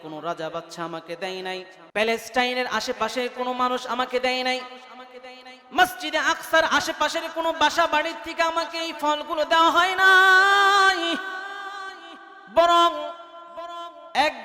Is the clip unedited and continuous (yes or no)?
no